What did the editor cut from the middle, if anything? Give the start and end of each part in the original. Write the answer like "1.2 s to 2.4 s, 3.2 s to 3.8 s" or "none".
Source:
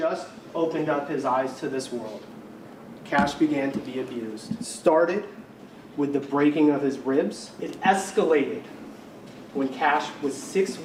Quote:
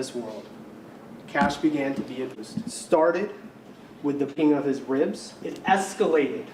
4.2 s to 4.3 s, 6.3 s to 6.5 s